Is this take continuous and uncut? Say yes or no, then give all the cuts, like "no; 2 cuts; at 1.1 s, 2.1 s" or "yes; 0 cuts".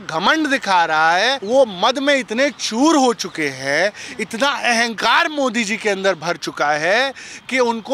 no; 1 cut; at 1.4 s